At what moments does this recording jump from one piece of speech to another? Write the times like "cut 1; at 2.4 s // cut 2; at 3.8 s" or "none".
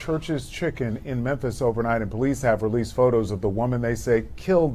none